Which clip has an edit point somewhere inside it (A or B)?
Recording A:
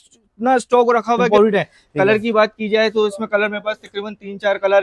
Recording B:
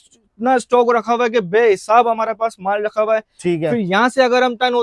A